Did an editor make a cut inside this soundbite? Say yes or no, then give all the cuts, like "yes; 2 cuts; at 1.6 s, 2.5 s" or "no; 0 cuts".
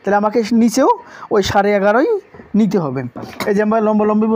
no; 0 cuts